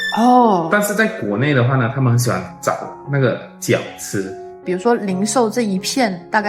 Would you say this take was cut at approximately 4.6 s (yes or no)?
yes